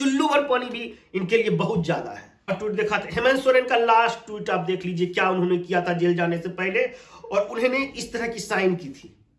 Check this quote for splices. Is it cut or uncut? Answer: uncut